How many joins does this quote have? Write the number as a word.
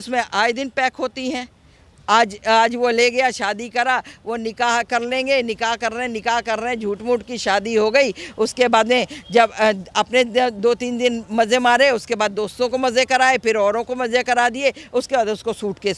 zero